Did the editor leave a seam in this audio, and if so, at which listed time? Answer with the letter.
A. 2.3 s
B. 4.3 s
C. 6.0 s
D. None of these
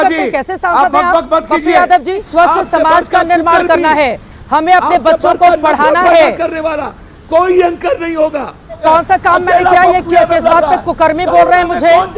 A